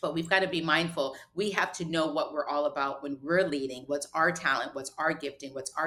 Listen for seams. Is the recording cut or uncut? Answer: uncut